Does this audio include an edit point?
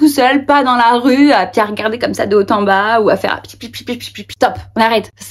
yes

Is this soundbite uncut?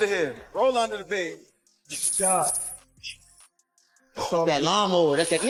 yes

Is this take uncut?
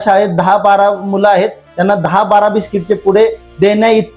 yes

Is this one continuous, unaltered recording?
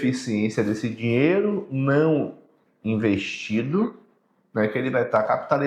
yes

